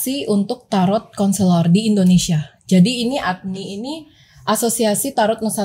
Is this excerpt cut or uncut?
uncut